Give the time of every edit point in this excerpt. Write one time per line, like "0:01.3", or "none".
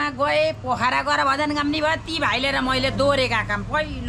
none